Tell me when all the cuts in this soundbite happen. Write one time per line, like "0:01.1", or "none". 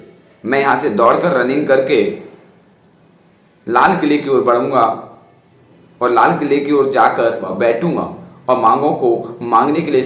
0:07.6

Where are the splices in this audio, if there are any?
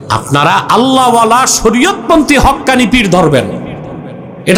none

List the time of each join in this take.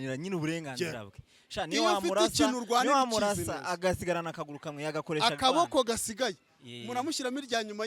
none

